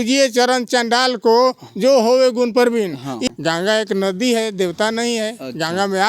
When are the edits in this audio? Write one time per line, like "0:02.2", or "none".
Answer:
0:03.2

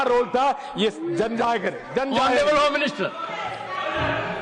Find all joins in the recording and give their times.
none

